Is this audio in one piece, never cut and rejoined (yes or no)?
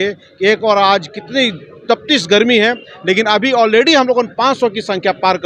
yes